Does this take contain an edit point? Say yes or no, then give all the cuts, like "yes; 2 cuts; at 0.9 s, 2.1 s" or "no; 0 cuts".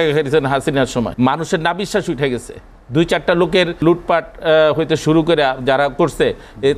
yes; 2 cuts; at 1.1 s, 3.8 s